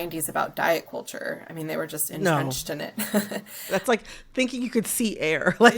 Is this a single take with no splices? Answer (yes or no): no